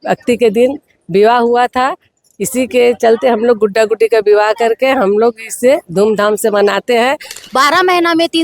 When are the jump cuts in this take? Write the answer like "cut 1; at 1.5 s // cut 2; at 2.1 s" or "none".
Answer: cut 1; at 7.4 s